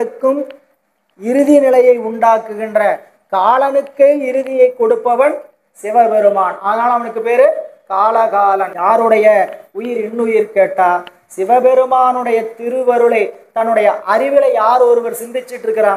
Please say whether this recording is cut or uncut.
cut